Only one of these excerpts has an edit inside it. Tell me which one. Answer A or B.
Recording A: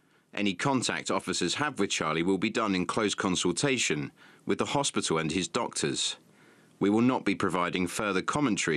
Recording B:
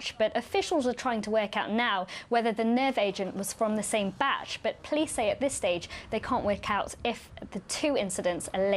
B